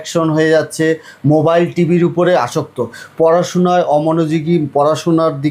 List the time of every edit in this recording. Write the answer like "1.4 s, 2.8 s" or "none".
none